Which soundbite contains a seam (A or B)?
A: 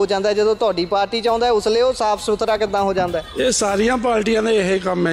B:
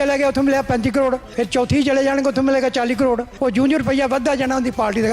B